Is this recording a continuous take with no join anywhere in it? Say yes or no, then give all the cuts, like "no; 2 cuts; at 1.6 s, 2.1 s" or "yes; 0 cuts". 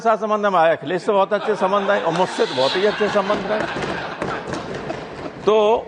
yes; 0 cuts